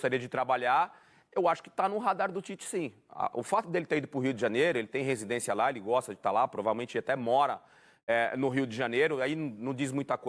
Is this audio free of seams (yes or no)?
yes